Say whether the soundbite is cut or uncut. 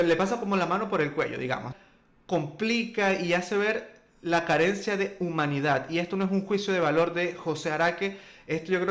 cut